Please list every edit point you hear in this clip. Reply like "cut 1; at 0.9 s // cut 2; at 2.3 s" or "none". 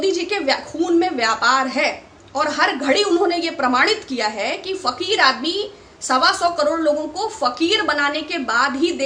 none